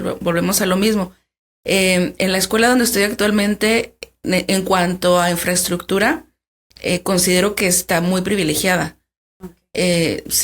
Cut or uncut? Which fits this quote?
uncut